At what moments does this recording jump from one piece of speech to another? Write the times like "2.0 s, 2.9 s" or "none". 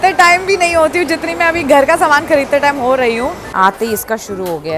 3.4 s